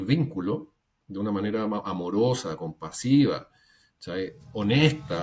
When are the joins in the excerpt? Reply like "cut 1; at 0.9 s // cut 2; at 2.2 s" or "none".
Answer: none